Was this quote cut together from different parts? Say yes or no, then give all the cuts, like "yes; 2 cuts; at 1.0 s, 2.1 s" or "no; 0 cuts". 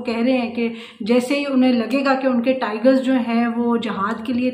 no; 0 cuts